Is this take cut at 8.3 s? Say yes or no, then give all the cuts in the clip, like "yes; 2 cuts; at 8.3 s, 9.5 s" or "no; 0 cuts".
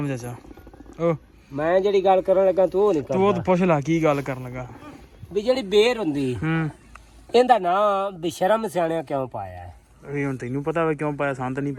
no; 0 cuts